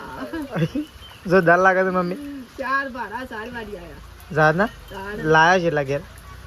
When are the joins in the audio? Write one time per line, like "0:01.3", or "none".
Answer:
none